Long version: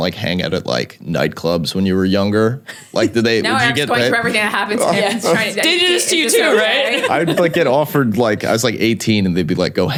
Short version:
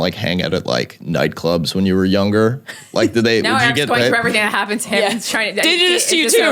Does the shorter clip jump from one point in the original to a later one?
no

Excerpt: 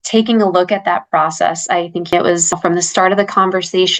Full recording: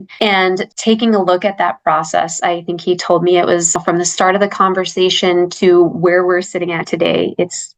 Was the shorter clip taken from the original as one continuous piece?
no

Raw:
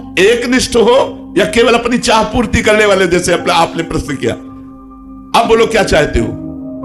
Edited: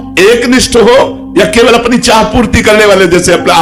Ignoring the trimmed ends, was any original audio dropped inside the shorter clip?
no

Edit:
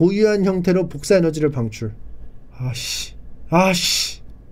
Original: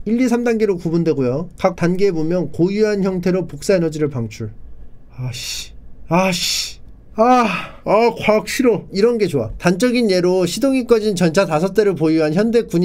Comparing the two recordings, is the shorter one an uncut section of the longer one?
yes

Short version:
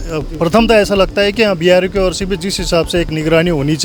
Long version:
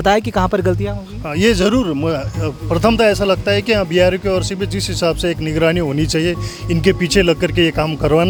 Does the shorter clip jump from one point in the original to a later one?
no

